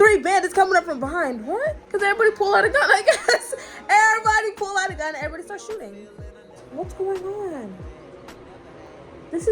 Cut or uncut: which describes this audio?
cut